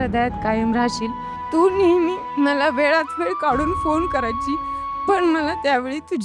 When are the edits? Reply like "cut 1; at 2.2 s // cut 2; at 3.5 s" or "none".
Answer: cut 1; at 1.4 s // cut 2; at 2.2 s